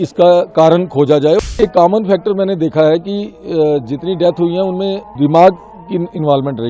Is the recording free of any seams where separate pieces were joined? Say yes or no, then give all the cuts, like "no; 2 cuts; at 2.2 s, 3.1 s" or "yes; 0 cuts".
no; 2 cuts; at 1.4 s, 5.1 s